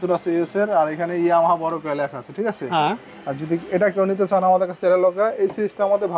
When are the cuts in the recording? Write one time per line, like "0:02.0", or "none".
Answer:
none

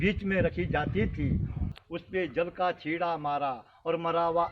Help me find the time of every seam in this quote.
0:01.7

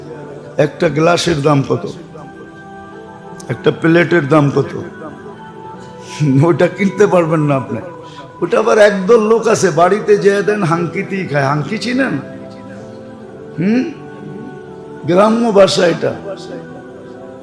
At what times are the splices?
0:16.4

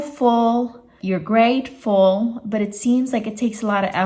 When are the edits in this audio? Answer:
0:00.9

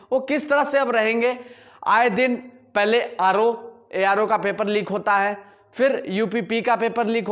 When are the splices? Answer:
none

